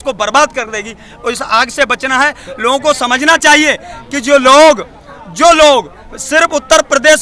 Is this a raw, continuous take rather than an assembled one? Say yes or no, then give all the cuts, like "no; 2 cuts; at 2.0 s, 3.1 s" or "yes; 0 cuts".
yes; 0 cuts